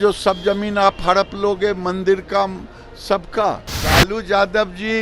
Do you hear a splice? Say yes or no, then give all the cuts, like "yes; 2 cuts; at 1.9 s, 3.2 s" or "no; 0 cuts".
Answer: yes; 1 cut; at 3.7 s